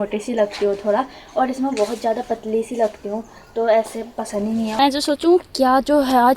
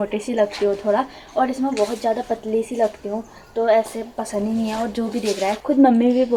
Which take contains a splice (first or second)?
first